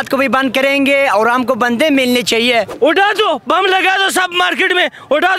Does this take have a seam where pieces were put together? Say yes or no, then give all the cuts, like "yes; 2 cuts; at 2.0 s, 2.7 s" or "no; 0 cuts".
yes; 1 cut; at 2.7 s